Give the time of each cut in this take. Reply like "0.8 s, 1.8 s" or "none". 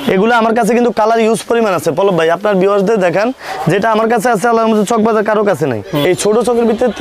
6.0 s